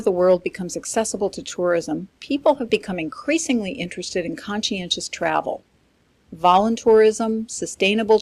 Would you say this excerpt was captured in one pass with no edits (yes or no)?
yes